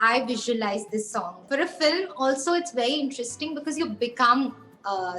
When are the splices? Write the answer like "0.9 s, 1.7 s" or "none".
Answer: 1.4 s

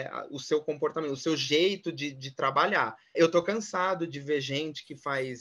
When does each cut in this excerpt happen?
3.2 s

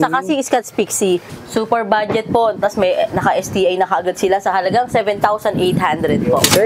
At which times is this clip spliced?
1.3 s

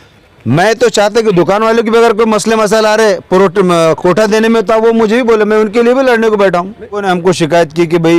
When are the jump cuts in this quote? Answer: 7.0 s

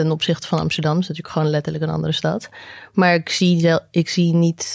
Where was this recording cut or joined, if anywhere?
none

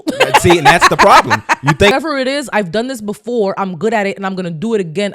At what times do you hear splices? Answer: 1.9 s

